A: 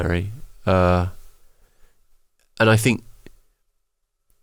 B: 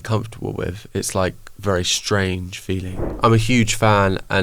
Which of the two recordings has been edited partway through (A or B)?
B